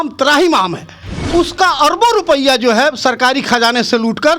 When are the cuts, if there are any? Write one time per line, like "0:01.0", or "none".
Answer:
0:01.2

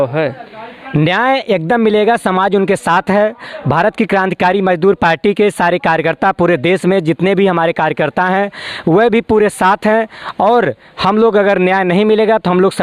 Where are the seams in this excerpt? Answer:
none

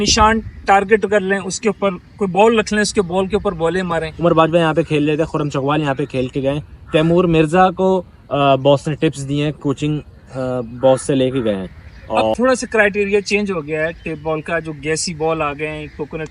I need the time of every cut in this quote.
0:04.1
0:12.3

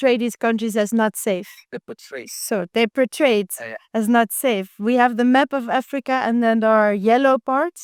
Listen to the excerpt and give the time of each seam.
none

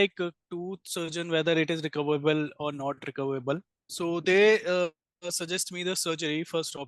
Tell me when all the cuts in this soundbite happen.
0:03.8

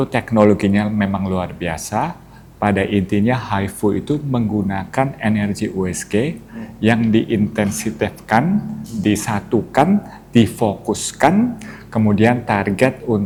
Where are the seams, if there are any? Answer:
none

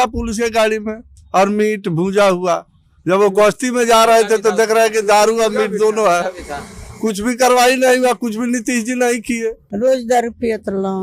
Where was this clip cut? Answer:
0:09.6

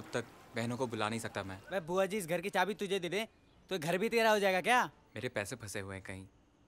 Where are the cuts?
0:01.6
0:05.0

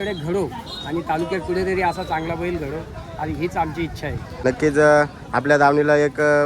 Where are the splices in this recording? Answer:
0:04.4

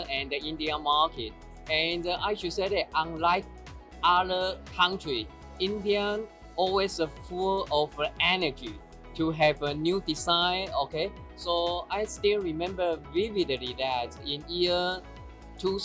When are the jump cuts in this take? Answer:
none

